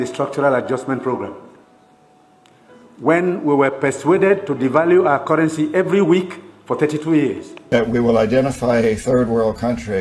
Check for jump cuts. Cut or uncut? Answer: cut